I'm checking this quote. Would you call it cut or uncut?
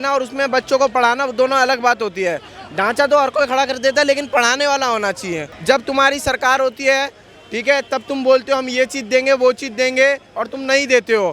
cut